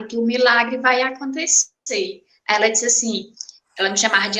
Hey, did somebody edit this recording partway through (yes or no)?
no